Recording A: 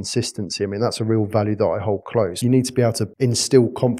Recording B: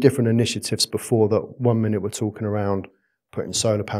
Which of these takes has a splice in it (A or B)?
A